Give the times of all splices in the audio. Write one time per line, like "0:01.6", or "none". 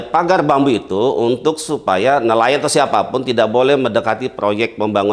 none